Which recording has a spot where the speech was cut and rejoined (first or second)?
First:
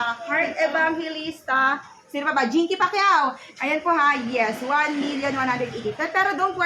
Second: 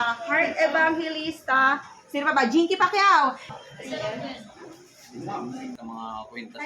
second